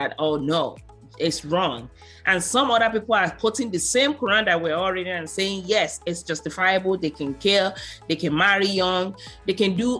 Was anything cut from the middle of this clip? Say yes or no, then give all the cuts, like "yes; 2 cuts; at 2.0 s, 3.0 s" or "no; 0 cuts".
no; 0 cuts